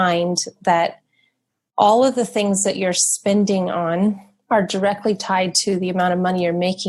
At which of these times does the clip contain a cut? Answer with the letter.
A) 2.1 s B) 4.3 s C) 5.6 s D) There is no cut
B